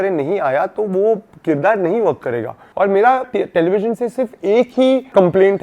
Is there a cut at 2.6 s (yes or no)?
yes